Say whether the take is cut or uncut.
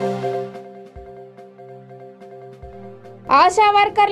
uncut